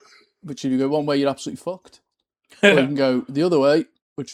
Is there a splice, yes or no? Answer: no